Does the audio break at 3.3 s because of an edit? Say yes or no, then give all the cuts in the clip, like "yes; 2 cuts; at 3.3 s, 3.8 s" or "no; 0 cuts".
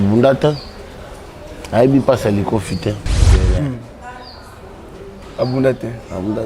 yes; 1 cut; at 3.3 s